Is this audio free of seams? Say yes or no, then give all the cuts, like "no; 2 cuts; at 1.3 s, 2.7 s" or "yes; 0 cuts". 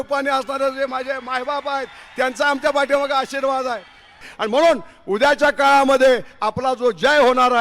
no; 1 cut; at 4.2 s